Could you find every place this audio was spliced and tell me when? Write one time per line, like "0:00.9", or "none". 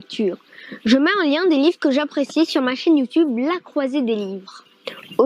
none